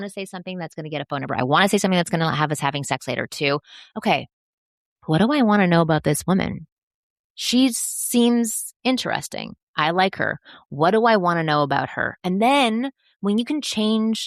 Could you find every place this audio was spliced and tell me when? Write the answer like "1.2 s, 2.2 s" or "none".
none